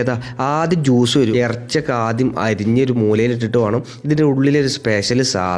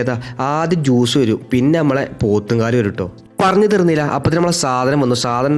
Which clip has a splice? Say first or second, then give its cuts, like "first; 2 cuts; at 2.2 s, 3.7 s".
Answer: first; 1 cut; at 1.3 s